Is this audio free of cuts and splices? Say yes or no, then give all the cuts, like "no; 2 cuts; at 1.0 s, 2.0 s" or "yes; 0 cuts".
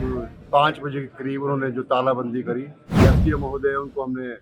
no; 1 cut; at 3.0 s